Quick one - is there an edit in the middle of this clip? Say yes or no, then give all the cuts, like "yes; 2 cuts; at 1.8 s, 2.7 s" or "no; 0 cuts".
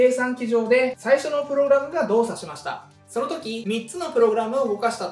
no; 0 cuts